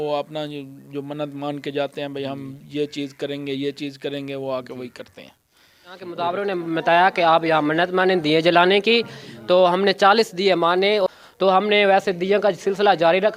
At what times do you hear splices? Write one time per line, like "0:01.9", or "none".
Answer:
0:06.1
0:11.0